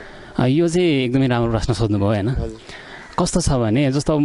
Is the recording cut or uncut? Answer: uncut